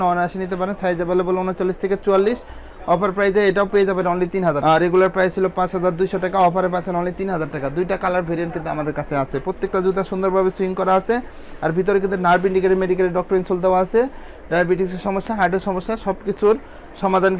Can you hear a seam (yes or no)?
no